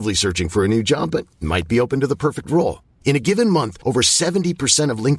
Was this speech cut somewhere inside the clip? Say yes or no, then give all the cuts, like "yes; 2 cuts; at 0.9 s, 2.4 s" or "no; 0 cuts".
no; 0 cuts